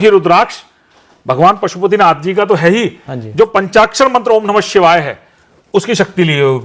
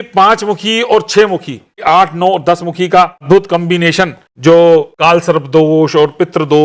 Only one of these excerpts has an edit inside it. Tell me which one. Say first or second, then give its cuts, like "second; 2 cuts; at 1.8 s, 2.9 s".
second; 4 cuts; at 1.8 s, 3.2 s, 4.2 s, 4.9 s